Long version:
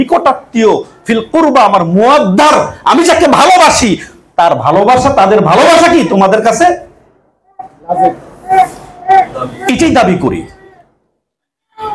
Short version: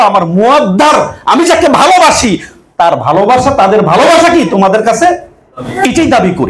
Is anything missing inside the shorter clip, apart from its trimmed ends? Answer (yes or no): yes